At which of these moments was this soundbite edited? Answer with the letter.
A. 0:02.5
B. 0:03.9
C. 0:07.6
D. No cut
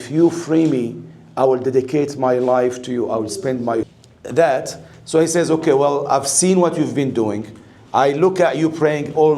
B